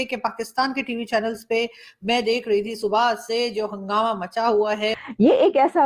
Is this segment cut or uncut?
cut